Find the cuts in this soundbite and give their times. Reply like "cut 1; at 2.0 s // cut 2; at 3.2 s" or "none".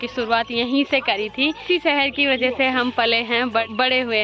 none